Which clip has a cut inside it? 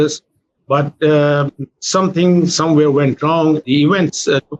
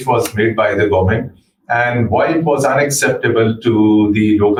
first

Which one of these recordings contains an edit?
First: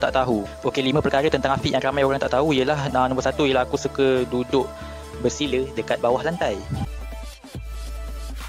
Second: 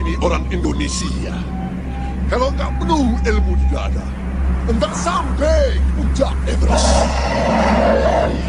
first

